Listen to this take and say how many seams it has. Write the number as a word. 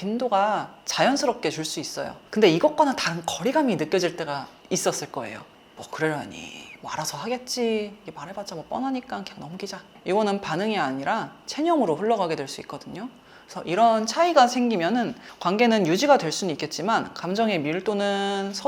three